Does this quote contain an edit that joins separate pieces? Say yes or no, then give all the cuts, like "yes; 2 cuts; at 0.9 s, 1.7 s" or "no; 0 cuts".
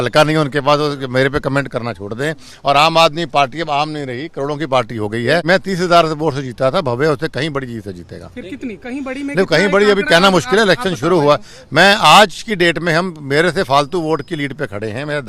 yes; 1 cut; at 5.4 s